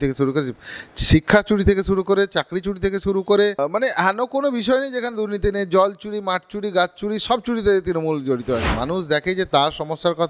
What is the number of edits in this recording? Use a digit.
2